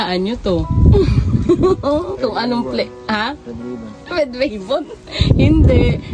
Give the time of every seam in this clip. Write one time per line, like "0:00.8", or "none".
none